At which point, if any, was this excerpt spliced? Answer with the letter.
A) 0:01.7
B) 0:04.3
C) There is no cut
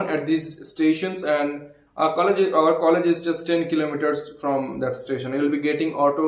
C